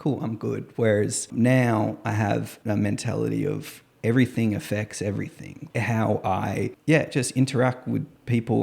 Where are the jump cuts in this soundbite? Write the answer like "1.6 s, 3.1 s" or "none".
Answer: 1.3 s, 2.5 s, 5.5 s, 6.8 s